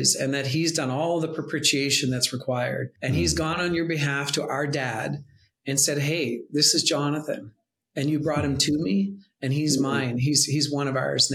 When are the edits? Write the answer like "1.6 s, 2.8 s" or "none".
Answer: 2.9 s